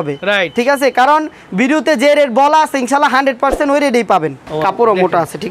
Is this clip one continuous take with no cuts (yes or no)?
no